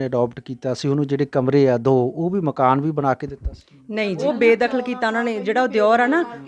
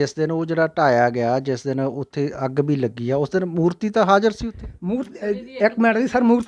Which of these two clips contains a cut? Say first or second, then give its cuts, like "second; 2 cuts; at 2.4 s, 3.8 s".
first; 1 cut; at 4.3 s